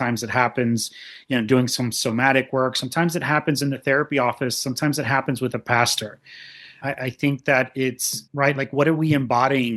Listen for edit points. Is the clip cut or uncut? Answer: uncut